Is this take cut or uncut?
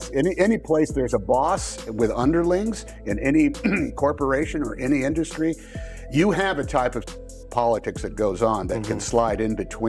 uncut